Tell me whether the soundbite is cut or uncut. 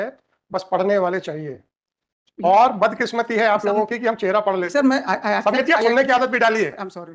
uncut